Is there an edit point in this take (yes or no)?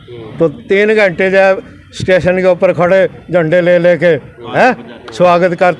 no